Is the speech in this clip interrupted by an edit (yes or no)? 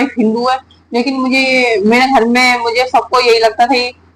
no